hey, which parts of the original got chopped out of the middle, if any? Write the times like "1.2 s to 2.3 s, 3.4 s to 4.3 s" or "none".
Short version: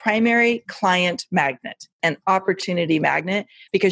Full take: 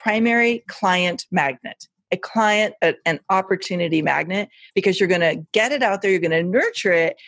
2.0 s to 3.0 s